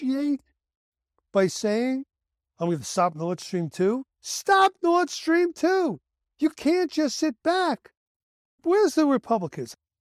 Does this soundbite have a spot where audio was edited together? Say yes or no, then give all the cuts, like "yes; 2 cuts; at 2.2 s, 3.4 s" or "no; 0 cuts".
no; 0 cuts